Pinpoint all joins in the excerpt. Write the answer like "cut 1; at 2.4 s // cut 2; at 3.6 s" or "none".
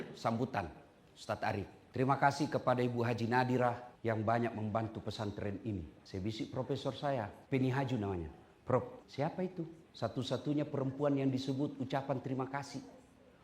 cut 1; at 1.8 s // cut 2; at 3.9 s // cut 3; at 6.0 s // cut 4; at 7.4 s // cut 5; at 9.5 s